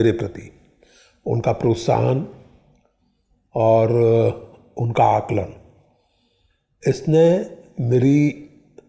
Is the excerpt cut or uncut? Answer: uncut